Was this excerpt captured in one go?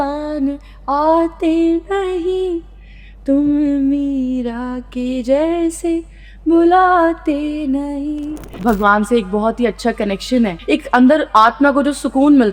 no; 2 cuts; at 8.6 s, 10.6 s

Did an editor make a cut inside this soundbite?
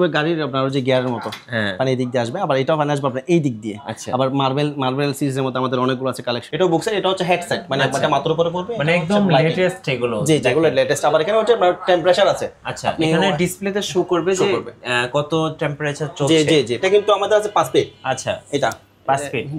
yes; 2 cuts; at 6.4 s, 16.8 s

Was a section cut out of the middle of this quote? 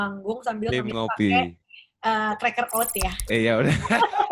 no; 0 cuts

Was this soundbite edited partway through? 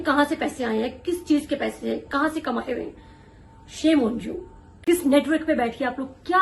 no; 0 cuts

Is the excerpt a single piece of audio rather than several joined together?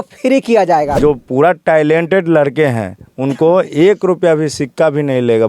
no; 1 cut; at 1.0 s

